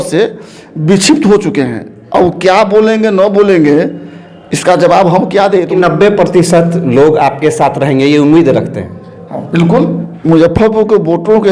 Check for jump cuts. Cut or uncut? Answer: cut